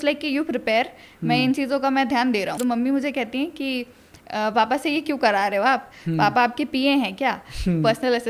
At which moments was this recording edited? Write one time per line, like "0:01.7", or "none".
0:02.6